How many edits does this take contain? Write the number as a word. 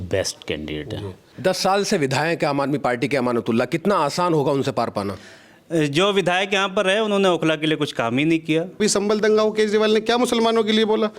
two